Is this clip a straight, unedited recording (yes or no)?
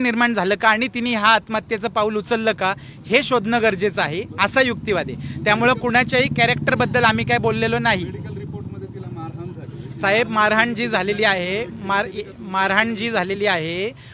yes